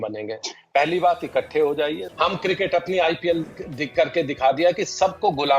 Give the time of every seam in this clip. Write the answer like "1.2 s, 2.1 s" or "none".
2.0 s